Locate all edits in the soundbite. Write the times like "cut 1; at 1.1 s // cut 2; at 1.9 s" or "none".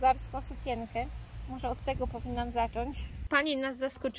cut 1; at 3.3 s